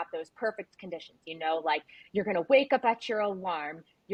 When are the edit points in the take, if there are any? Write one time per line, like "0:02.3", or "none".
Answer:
none